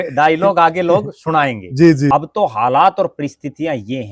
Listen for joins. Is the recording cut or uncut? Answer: cut